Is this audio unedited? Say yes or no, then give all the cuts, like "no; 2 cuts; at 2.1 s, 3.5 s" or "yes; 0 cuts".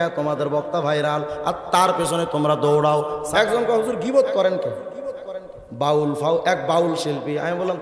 no; 1 cut; at 3.2 s